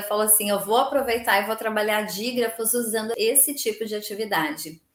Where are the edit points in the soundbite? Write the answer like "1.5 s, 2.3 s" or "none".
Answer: none